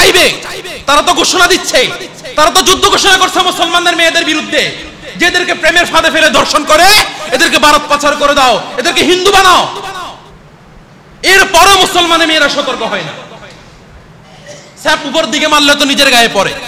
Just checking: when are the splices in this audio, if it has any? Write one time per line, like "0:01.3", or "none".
none